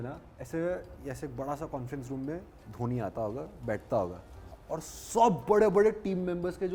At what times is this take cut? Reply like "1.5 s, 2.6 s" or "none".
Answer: none